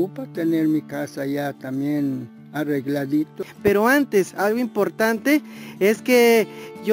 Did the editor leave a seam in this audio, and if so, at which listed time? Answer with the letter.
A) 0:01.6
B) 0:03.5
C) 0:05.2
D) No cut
B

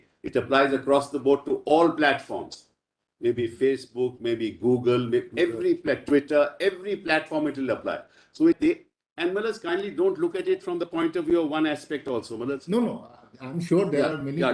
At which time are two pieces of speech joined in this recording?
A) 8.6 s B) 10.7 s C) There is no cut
A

